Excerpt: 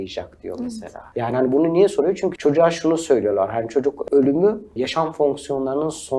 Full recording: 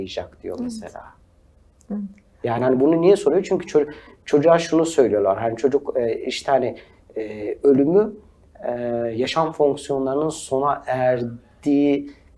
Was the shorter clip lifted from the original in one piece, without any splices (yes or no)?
no